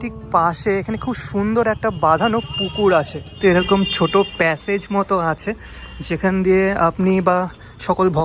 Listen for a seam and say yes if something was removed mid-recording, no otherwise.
yes